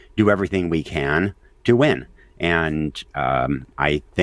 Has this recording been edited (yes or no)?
no